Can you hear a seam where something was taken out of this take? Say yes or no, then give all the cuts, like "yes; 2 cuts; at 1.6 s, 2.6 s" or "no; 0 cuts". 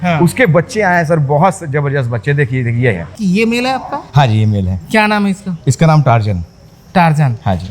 yes; 1 cut; at 3.1 s